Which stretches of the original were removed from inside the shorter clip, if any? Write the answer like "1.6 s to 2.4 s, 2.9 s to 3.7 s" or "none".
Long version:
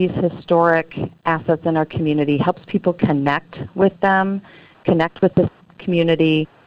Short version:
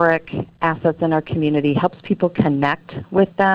none